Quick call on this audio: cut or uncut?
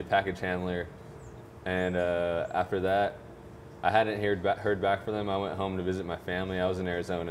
uncut